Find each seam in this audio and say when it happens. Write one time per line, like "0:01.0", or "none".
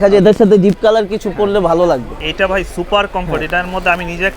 0:02.2